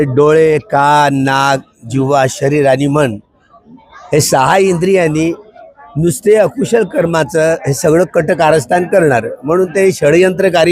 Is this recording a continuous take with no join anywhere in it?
yes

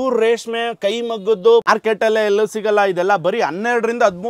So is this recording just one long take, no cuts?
no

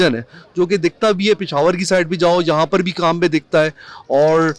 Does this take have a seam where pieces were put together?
no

